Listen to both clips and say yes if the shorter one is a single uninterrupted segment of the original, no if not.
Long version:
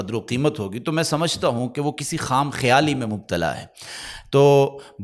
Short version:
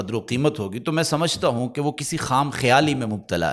yes